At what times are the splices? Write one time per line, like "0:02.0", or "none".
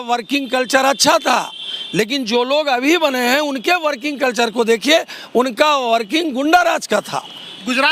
none